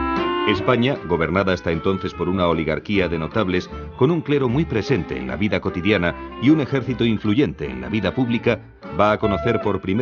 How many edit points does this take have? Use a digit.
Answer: 1